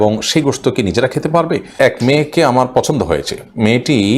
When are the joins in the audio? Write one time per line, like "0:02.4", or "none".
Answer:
0:01.8